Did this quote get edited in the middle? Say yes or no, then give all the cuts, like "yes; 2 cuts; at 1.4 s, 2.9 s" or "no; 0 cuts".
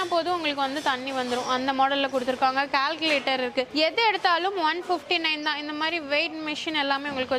no; 0 cuts